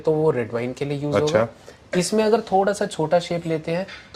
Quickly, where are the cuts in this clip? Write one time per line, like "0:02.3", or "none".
none